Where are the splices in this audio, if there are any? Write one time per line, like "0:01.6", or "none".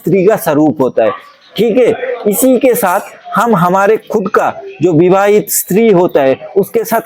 none